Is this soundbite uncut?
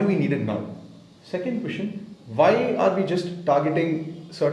yes; 0 cuts

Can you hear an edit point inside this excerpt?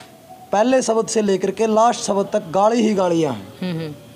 no; 0 cuts

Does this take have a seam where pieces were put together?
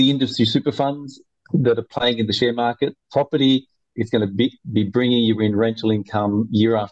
yes; 1 cut; at 4.0 s

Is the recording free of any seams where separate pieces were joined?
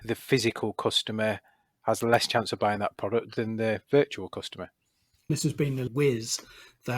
yes; 0 cuts

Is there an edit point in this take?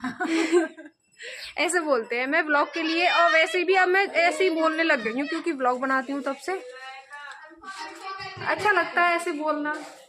no; 0 cuts

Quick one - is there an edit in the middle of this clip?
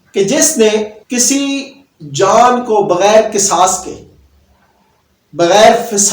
yes; 1 cut; at 1.0 s

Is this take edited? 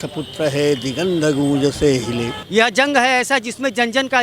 yes; 1 cut; at 2.3 s

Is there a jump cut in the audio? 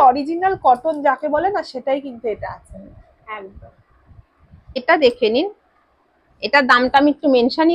no; 0 cuts

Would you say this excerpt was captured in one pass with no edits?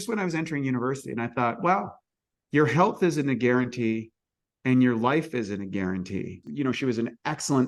no; 1 cut; at 6.5 s

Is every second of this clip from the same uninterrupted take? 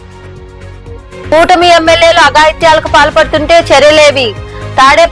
no; 1 cut; at 1.3 s

